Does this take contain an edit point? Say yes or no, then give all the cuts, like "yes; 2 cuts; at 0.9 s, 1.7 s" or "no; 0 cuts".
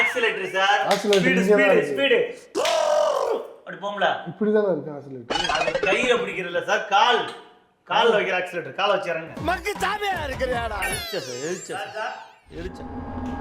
yes; 1 cut; at 10.9 s